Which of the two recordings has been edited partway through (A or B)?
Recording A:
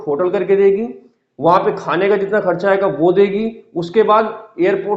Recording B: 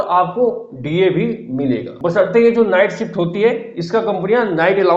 B